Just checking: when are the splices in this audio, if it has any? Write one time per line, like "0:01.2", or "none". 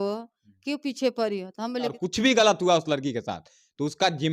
0:02.0